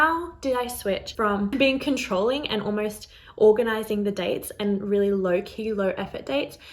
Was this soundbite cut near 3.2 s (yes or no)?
no